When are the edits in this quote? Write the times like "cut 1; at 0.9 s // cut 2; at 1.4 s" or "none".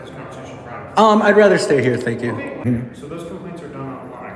cut 1; at 2.6 s